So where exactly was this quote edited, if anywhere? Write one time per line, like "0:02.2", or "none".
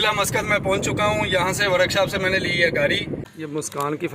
0:03.1